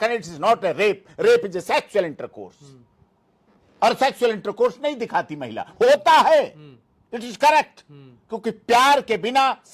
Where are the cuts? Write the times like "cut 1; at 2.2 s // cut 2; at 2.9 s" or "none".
none

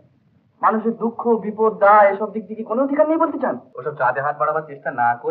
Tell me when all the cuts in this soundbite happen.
cut 1; at 3.7 s

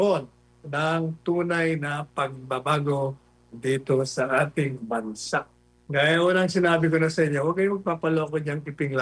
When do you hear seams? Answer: cut 1; at 5.7 s

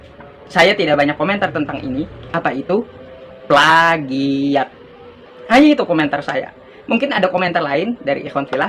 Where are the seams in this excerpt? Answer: cut 1; at 2.2 s

